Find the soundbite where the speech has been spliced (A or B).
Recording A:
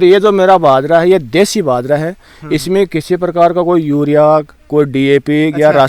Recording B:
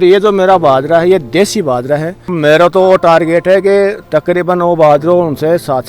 B